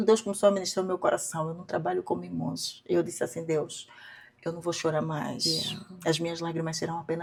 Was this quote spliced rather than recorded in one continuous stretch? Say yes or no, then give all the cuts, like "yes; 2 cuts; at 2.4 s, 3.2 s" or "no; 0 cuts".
no; 0 cuts